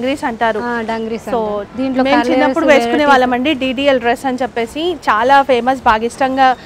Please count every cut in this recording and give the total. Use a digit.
0